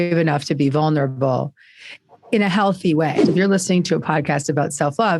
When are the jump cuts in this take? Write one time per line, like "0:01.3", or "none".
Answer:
0:03.2